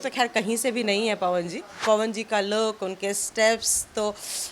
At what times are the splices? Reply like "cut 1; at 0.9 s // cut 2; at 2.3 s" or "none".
cut 1; at 1.8 s